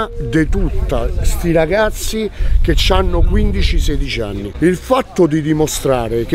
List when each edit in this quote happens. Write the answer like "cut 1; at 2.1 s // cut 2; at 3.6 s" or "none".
cut 1; at 4.5 s